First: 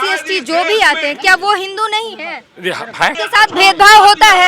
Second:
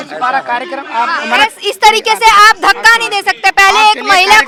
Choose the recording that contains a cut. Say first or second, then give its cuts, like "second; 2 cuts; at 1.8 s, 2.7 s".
first; 1 cut; at 3.1 s